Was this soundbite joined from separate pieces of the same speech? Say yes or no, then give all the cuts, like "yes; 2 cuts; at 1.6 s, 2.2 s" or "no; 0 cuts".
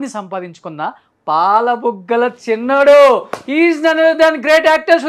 no; 0 cuts